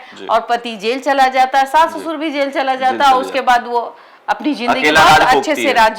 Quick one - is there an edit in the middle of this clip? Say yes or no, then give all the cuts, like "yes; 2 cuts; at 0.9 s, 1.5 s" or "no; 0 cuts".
no; 0 cuts